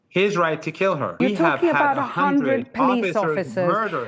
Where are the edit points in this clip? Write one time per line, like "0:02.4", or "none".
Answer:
0:01.1